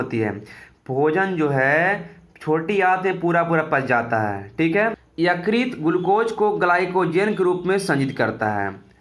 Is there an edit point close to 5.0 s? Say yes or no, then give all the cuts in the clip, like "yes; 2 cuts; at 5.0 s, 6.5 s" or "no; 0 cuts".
yes; 1 cut; at 5.0 s